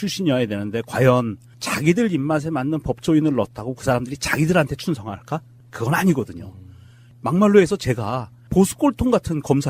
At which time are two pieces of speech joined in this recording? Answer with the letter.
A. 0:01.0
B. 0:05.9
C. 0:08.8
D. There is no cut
D